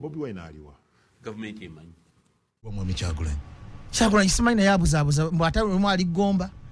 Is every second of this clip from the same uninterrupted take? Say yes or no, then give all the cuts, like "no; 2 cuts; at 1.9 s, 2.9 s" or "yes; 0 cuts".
no; 1 cut; at 2.8 s